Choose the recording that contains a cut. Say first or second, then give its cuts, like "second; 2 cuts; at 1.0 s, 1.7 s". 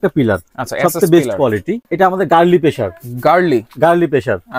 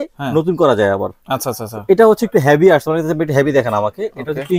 first; 1 cut; at 1.9 s